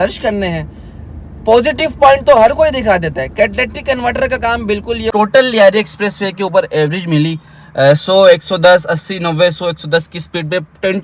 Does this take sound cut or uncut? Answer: cut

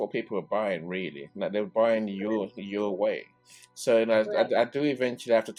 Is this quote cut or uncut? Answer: uncut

